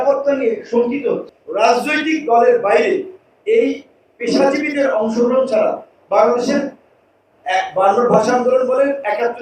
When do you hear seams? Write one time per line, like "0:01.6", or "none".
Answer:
0:01.4